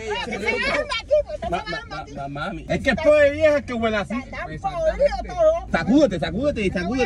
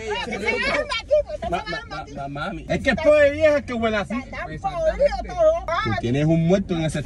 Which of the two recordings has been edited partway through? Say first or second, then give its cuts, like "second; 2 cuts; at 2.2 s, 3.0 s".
second; 1 cut; at 5.6 s